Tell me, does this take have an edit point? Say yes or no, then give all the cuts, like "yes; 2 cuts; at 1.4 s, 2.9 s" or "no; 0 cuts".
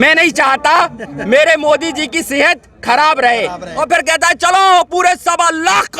yes; 1 cut; at 3.7 s